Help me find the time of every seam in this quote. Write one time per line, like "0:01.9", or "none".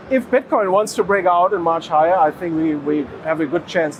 none